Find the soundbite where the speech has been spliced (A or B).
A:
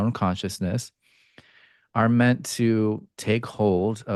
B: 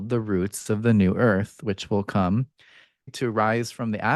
B